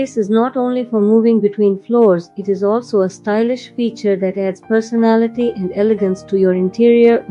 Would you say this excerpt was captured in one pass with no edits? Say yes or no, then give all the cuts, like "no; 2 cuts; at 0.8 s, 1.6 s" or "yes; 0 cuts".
yes; 0 cuts